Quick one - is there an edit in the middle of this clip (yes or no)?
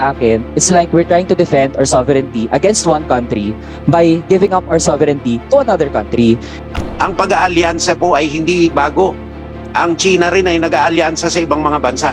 yes